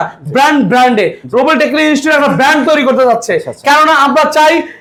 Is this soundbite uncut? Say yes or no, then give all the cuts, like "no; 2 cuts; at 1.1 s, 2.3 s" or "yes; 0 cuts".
yes; 0 cuts